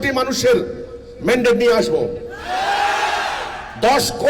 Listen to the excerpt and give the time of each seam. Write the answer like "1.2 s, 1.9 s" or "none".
none